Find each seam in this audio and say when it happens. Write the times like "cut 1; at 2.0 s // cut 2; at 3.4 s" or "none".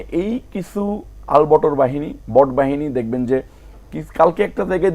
none